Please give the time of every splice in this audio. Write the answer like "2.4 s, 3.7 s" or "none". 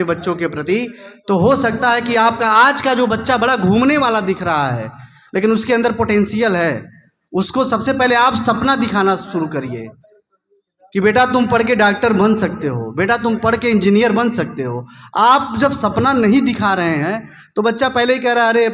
none